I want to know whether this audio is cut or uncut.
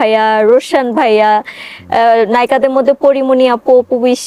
uncut